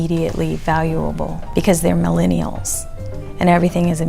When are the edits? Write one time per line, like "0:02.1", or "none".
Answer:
0:01.4